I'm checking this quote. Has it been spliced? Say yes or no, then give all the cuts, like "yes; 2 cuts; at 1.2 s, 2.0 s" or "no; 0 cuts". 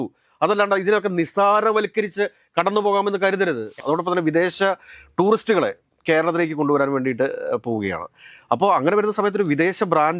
yes; 1 cut; at 3.7 s